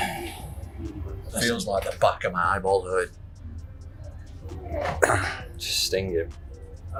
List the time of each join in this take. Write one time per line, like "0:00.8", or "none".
none